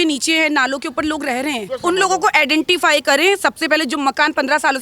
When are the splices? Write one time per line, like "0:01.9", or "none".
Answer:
0:01.7